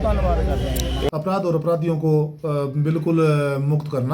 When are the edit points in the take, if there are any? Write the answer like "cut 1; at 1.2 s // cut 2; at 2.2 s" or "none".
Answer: cut 1; at 1.1 s